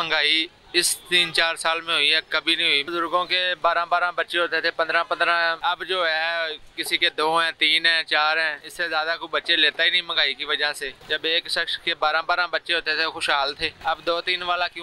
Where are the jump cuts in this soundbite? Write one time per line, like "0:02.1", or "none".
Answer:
0:02.9
0:05.6
0:08.6
0:11.0
0:13.8